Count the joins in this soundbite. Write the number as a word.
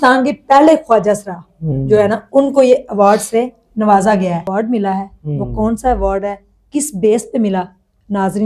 one